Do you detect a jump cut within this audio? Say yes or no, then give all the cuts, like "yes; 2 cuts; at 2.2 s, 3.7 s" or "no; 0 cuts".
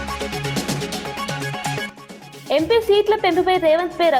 yes; 1 cut; at 1.8 s